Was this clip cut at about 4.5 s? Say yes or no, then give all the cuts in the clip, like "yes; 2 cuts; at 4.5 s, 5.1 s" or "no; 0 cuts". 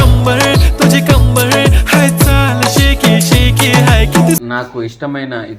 yes; 1 cut; at 4.5 s